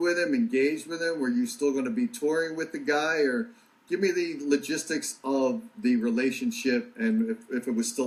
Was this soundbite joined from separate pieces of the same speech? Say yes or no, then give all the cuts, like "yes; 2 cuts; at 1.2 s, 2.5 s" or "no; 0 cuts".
no; 0 cuts